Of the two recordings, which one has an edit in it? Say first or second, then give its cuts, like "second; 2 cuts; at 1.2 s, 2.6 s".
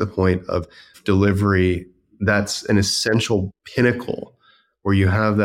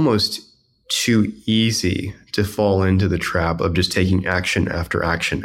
first; 2 cuts; at 0.9 s, 3.6 s